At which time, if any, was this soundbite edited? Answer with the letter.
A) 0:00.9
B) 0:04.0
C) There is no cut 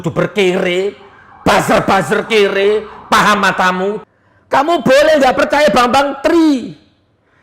B